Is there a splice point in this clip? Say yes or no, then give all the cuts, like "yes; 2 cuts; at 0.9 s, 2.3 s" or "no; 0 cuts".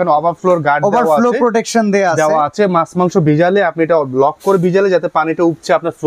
no; 0 cuts